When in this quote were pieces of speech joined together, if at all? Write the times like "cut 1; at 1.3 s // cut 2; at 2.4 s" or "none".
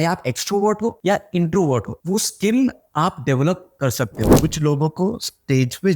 cut 1; at 1.0 s // cut 2; at 1.9 s // cut 3; at 4.2 s